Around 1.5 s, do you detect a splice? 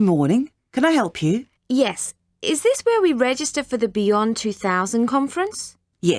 yes; 1 cut; at 1.5 s

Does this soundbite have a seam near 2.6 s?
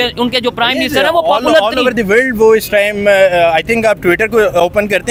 no; 0 cuts

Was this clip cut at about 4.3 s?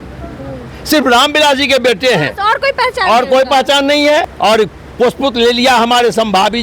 yes; 1 cut; at 4.3 s

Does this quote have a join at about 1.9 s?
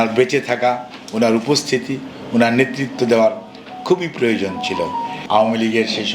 no; 1 cut; at 5.2 s

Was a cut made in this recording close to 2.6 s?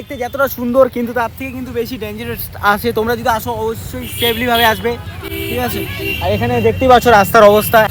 no; 0 cuts

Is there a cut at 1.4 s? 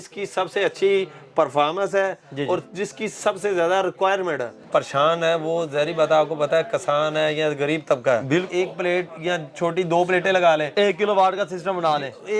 no; 2 cuts; at 4.5 s, 8.5 s

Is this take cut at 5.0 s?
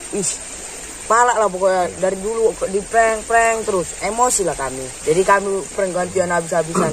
yes; 1 cut; at 5.0 s

